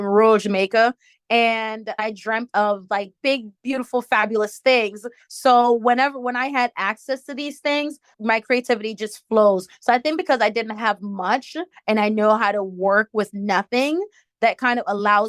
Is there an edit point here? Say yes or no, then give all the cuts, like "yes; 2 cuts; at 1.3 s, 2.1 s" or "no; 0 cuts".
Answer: yes; 2 cuts; at 2.0 s, 8.1 s